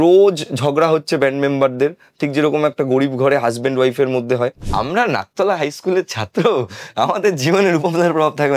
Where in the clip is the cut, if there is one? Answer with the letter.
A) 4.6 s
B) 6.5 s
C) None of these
A